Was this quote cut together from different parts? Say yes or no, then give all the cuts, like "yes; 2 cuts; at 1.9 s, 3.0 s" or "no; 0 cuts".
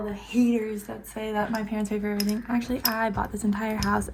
no; 0 cuts